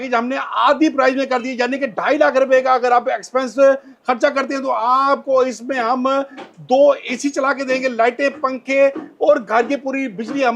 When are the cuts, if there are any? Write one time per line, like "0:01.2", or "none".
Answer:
none